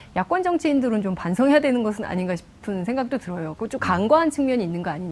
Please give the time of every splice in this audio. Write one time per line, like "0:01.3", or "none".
none